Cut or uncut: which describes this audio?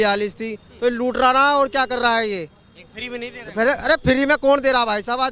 uncut